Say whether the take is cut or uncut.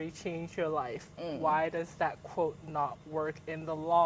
uncut